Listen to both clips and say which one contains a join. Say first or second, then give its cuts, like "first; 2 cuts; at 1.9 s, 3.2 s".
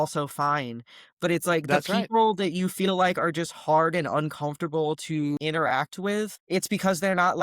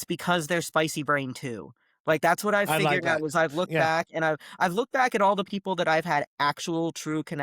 first; 2 cuts; at 5.4 s, 6.4 s